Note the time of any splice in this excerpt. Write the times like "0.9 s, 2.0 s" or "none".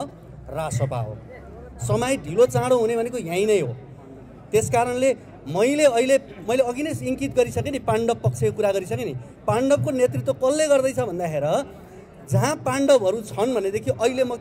none